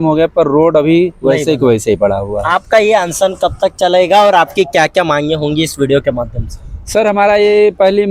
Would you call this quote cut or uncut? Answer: uncut